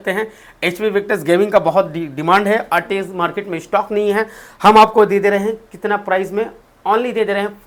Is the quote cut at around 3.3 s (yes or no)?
no